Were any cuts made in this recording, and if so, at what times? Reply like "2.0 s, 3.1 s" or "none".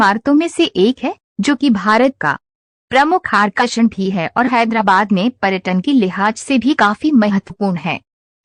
none